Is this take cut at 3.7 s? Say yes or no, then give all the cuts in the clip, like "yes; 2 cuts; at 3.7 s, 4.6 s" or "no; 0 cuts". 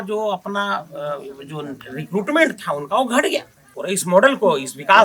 yes; 1 cut; at 3.7 s